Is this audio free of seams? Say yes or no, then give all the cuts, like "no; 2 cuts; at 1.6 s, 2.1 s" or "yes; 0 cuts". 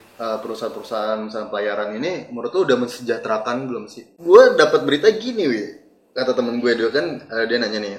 no; 1 cut; at 4.1 s